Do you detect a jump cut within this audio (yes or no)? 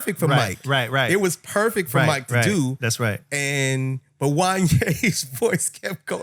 no